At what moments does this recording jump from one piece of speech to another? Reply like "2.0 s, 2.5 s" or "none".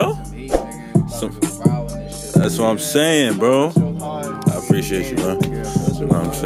none